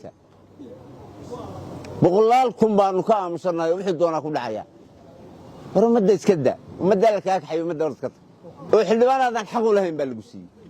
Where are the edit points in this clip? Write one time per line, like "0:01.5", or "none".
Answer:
0:08.6